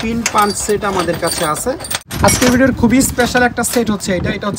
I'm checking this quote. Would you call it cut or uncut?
cut